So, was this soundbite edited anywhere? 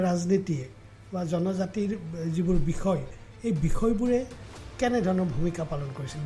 no; 0 cuts

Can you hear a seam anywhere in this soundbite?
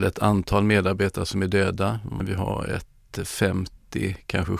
no; 0 cuts

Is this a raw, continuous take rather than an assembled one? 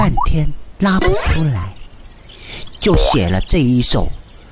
yes; 0 cuts

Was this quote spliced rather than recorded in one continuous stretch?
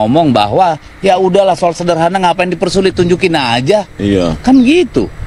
no; 0 cuts

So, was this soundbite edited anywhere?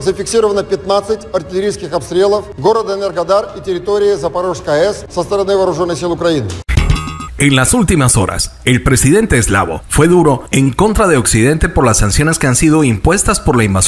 yes; 3 cuts; at 2.5 s, 5.0 s, 6.7 s

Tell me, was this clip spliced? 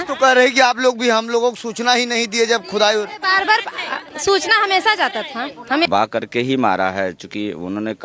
yes; 1 cut; at 5.9 s

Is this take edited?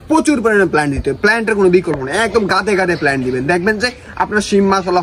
no; 0 cuts

